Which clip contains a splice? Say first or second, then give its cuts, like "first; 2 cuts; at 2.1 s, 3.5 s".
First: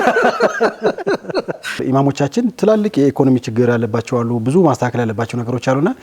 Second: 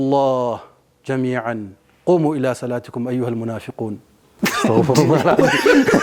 first; 1 cut; at 1.7 s